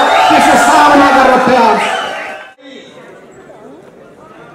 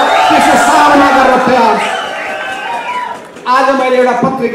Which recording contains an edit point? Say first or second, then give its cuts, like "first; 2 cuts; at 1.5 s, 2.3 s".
first; 1 cut; at 2.6 s